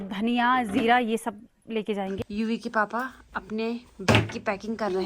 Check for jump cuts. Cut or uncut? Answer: cut